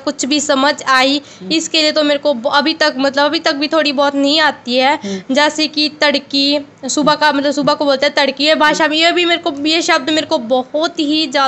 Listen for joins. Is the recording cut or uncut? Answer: uncut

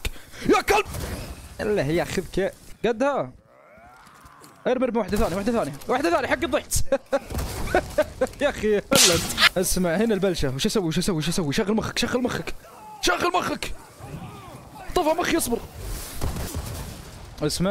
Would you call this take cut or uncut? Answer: cut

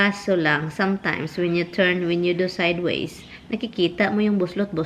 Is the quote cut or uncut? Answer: uncut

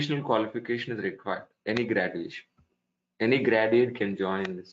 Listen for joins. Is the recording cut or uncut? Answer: uncut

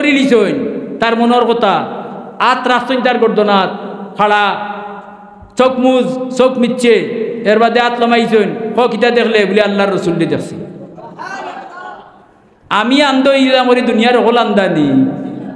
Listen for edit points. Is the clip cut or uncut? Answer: uncut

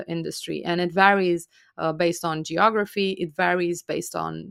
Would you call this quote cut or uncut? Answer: uncut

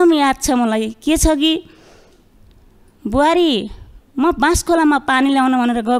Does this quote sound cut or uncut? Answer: uncut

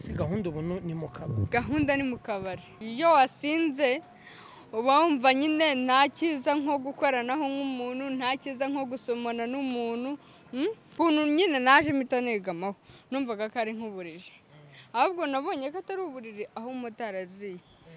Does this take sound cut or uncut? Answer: cut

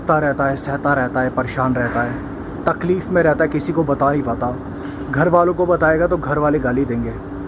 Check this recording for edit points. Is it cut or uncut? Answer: uncut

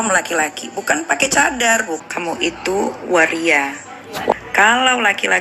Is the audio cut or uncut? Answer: cut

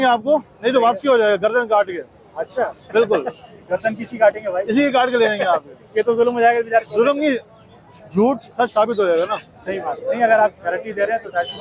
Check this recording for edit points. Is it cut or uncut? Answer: uncut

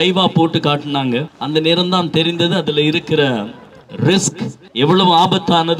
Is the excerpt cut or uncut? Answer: cut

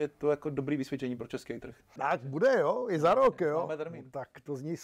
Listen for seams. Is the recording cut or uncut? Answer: cut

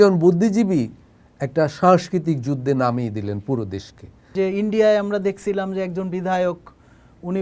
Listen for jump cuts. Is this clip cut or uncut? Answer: cut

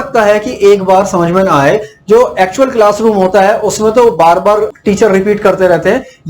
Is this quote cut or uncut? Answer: cut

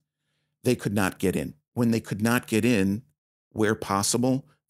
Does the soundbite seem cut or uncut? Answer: cut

